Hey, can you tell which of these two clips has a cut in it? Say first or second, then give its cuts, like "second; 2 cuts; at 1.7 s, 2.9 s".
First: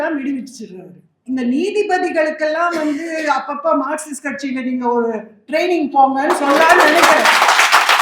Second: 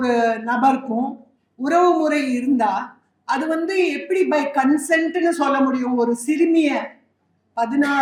first; 1 cut; at 1.2 s